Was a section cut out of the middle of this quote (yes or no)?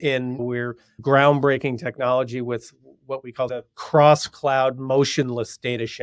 yes